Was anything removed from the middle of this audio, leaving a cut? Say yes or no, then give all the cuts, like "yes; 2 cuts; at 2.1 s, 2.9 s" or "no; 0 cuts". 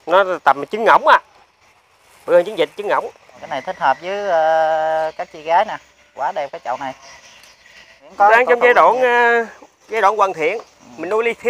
yes; 2 cuts; at 3.5 s, 8.1 s